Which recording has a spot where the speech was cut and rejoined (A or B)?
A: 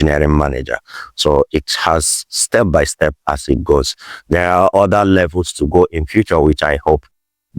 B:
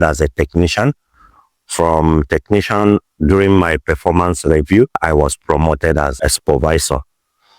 B